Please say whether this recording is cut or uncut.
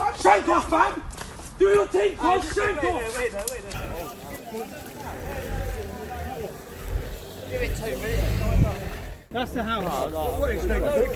cut